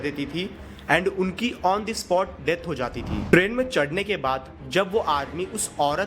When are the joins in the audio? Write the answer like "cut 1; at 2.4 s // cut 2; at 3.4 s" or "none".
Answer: cut 1; at 3.1 s